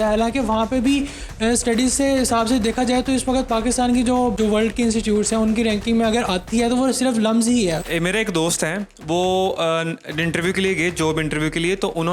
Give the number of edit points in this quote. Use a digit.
2